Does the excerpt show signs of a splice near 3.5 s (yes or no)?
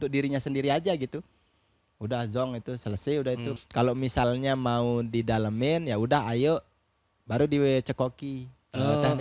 yes